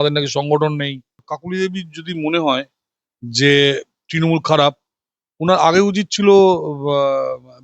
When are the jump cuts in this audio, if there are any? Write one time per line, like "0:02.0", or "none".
0:01.3